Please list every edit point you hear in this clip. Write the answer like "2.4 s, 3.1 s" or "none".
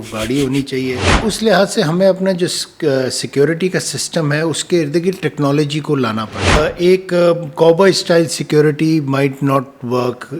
1.2 s, 6.6 s